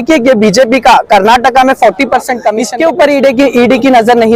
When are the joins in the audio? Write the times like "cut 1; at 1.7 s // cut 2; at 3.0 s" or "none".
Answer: cut 1; at 2.6 s